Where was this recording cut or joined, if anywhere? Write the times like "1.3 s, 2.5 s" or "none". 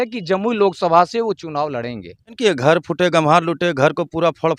2.4 s